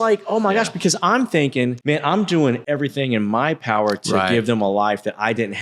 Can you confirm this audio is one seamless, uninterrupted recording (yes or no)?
no